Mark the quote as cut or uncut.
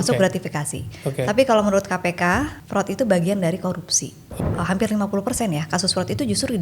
cut